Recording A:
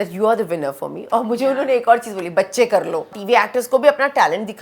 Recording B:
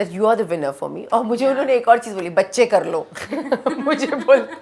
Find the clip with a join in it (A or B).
A